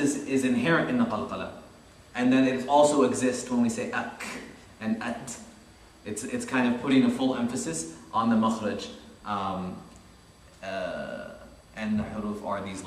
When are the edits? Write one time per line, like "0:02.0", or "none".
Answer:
0:03.2